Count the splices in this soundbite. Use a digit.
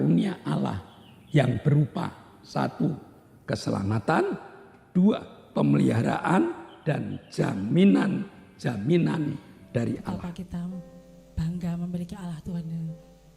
1